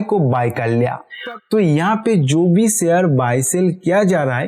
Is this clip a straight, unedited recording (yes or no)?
no